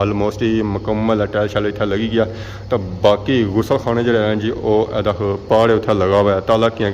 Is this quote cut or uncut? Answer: uncut